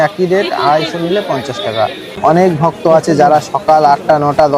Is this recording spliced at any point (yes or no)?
yes